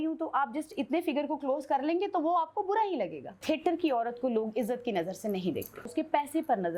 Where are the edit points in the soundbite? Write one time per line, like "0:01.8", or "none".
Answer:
0:03.3
0:05.9